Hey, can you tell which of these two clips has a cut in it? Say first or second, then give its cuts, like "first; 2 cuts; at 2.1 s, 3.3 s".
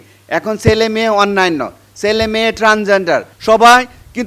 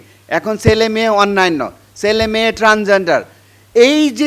first; 1 cut; at 3.3 s